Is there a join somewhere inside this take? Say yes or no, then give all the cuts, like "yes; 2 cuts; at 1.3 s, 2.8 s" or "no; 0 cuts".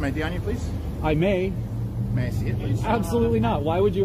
no; 0 cuts